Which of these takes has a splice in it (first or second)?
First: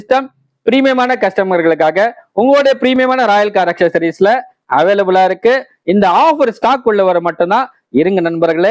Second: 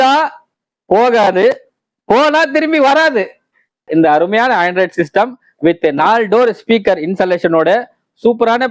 second